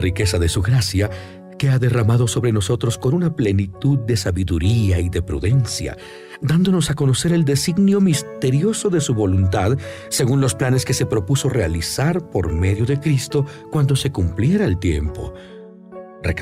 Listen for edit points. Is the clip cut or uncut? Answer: uncut